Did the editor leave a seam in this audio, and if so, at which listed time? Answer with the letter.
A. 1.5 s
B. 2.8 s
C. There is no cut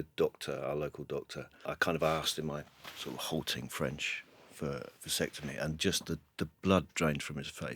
A